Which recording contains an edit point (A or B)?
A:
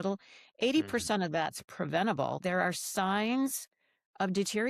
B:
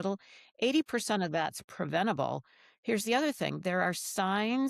A